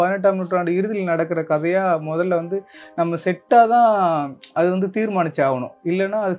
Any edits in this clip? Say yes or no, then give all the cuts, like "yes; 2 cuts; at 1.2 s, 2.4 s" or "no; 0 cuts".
no; 0 cuts